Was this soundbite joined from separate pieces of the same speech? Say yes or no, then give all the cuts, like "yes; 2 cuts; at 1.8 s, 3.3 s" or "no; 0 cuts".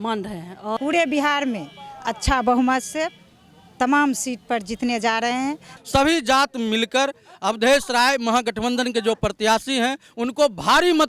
yes; 2 cuts; at 0.8 s, 5.7 s